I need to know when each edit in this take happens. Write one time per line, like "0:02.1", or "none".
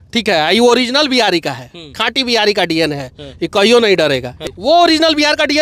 0:04.4